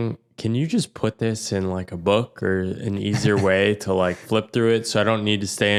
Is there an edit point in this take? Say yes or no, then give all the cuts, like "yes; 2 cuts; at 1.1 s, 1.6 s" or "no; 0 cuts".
no; 0 cuts